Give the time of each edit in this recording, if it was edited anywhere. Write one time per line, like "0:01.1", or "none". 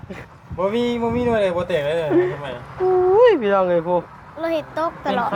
none